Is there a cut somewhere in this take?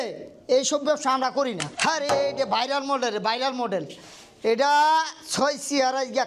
yes; 1 cut; at 1.7 s

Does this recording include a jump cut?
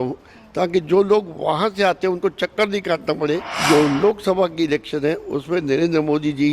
yes; 1 cut; at 3.5 s

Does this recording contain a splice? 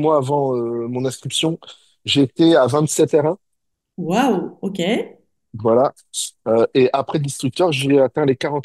no; 0 cuts

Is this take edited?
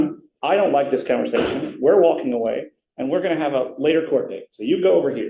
no; 0 cuts

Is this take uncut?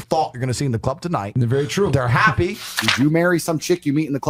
no; 1 cut; at 2.8 s

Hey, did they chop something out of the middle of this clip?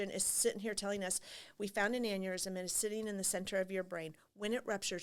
no; 0 cuts

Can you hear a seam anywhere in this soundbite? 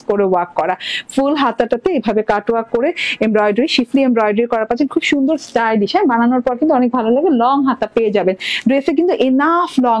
no; 0 cuts

